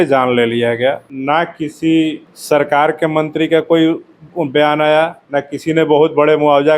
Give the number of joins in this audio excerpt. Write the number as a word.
three